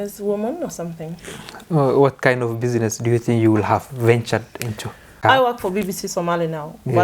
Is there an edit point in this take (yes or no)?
yes